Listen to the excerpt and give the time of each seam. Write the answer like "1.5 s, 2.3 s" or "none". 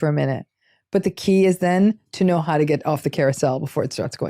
none